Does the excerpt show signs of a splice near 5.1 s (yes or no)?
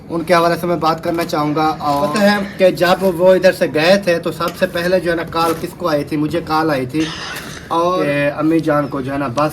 no